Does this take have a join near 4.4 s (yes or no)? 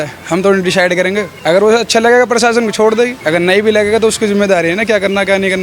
no